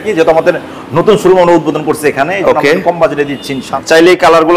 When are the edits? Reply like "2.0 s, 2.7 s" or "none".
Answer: 3.7 s